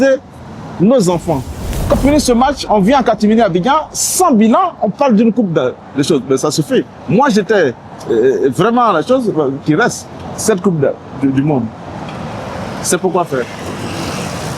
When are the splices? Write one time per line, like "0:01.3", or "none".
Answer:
0:02.0